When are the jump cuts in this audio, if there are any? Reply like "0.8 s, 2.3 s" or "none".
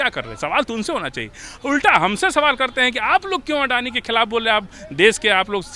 none